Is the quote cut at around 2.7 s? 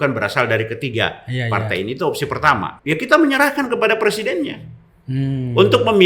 yes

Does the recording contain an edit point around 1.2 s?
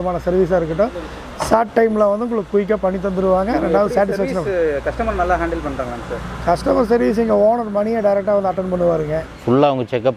no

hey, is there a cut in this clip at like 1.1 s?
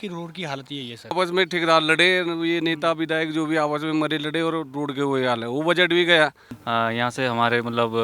yes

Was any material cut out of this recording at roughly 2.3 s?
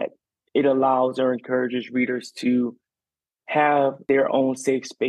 no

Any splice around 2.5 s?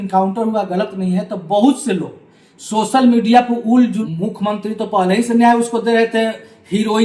no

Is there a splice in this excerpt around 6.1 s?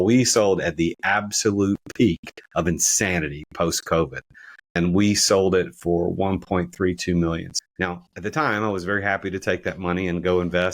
no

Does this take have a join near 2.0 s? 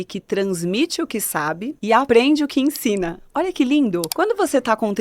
yes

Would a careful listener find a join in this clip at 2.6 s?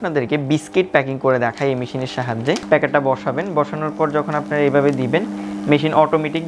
yes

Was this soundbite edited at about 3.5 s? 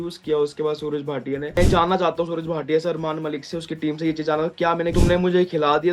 no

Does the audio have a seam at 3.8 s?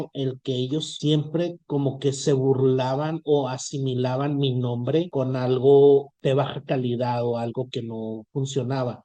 no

